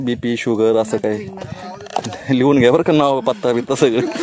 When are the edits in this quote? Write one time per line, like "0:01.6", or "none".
none